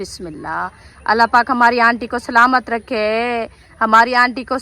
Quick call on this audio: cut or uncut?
cut